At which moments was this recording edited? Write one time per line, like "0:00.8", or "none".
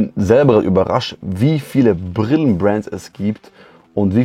none